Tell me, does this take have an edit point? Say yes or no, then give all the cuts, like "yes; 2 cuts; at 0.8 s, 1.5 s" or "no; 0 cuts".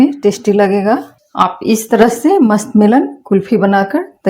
yes; 1 cut; at 1.2 s